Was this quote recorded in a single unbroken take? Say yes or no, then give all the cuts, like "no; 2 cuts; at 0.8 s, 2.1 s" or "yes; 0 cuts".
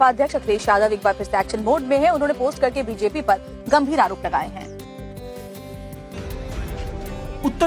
no; 1 cut; at 1.8 s